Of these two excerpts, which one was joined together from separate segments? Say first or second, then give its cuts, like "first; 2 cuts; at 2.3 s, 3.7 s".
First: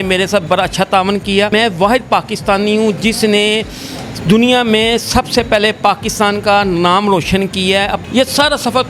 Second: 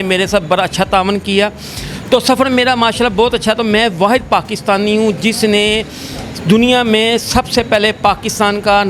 first; 2 cuts; at 1.5 s, 8.0 s